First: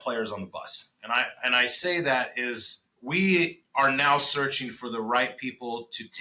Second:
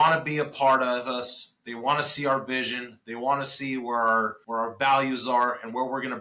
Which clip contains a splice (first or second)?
second